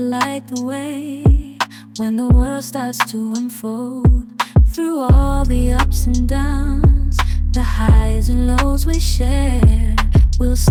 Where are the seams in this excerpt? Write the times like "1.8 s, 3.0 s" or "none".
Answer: none